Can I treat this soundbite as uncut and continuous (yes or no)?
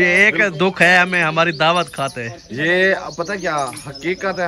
yes